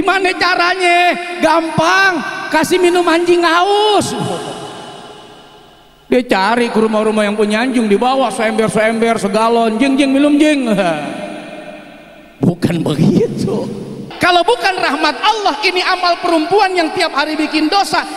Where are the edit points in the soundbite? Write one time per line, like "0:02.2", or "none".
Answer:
0:14.0